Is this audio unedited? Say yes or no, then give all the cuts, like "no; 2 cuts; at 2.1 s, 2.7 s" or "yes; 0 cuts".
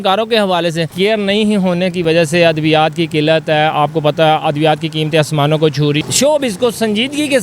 no; 2 cuts; at 0.9 s, 6.0 s